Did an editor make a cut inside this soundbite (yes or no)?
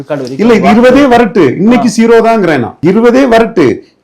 no